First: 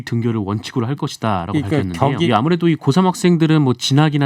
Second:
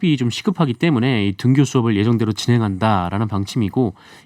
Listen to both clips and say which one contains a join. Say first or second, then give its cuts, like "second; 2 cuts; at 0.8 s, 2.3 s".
first; 1 cut; at 2.3 s